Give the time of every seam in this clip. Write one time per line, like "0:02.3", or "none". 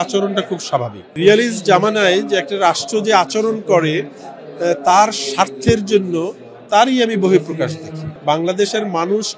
0:01.2
0:08.1